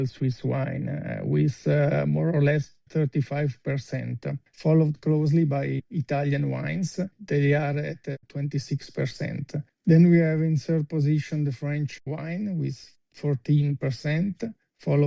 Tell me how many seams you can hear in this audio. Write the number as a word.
two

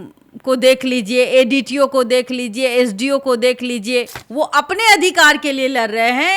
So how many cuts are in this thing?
one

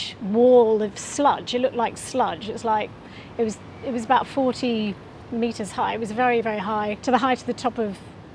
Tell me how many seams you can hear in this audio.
zero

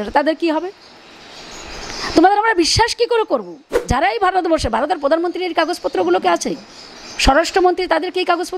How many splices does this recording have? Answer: one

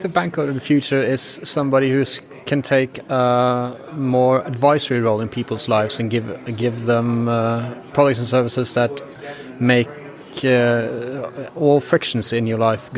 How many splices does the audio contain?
zero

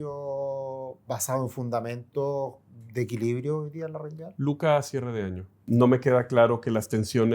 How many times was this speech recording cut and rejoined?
two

